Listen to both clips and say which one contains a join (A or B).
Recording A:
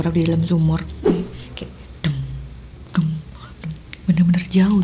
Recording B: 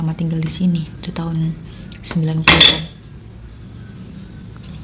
A